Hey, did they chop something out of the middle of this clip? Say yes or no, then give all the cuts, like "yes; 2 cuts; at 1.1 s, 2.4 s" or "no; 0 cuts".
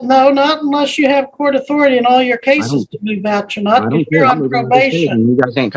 no; 0 cuts